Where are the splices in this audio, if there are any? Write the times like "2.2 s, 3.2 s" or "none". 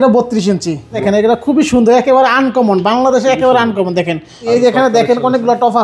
1.0 s, 4.5 s